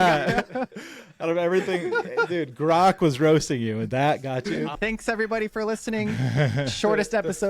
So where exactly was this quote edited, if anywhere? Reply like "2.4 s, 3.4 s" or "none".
4.7 s